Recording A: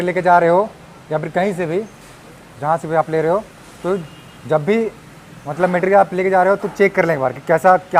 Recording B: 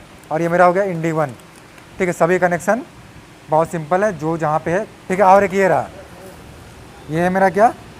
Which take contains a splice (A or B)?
B